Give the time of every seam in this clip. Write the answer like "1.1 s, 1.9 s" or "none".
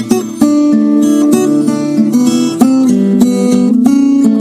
none

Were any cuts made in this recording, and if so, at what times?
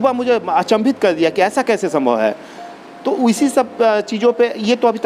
none

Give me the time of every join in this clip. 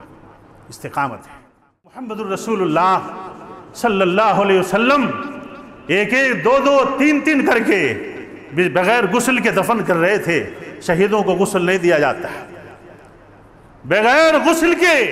2.1 s

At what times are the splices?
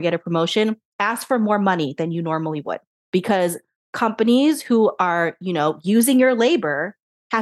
2.9 s

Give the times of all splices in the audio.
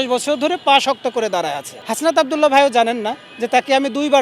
1.8 s

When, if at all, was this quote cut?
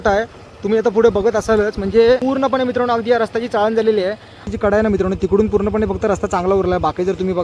2.2 s, 4.5 s

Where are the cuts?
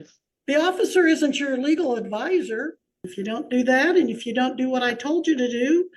3.1 s

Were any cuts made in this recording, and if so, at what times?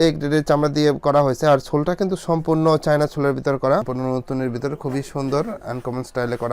3.9 s

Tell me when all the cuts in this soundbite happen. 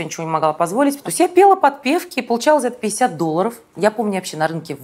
1.0 s, 3.6 s

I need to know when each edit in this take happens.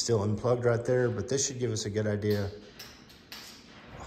none

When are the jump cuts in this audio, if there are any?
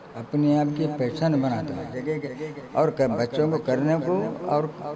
2.0 s

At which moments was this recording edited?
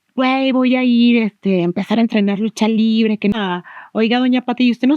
3.3 s

